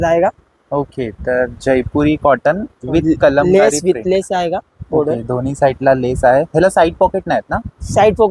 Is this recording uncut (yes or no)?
yes